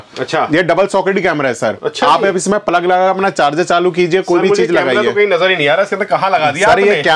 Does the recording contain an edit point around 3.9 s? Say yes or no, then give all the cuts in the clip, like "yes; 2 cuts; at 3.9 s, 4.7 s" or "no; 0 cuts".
no; 0 cuts